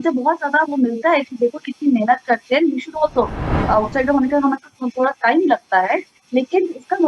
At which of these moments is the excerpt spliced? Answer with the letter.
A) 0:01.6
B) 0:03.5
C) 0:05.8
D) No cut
B